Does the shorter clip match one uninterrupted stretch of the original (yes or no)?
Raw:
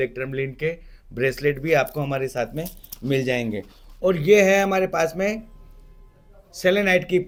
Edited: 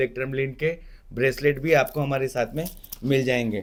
yes